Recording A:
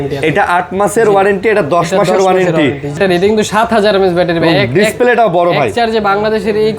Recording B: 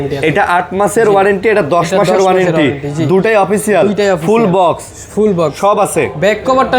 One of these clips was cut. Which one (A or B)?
A